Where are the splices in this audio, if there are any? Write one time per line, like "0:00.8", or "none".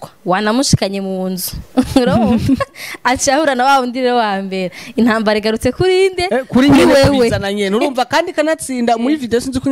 none

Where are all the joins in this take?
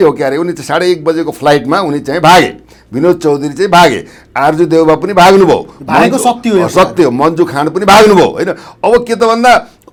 none

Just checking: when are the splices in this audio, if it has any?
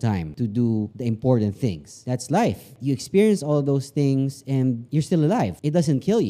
0:01.9

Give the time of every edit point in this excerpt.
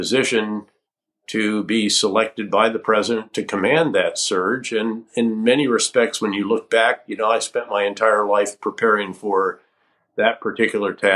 none

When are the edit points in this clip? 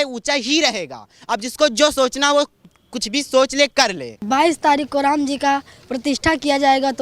0:04.1

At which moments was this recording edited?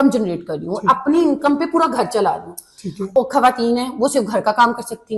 0:03.2

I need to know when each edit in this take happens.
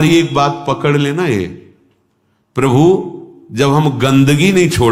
none

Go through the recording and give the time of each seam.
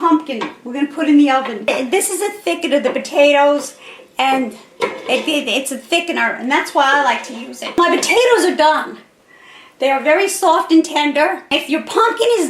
0:01.7
0:07.8
0:11.5

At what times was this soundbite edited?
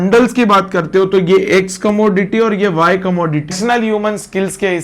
0:03.6

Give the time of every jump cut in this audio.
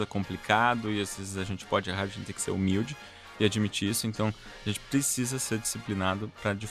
none

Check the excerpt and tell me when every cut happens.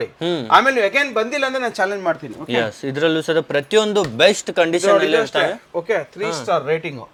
none

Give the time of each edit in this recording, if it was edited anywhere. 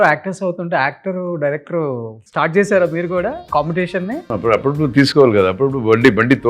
0:02.2
0:03.4
0:04.3

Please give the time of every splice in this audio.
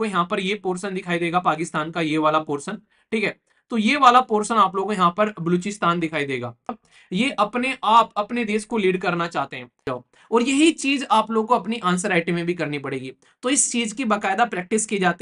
0:06.8
0:09.9

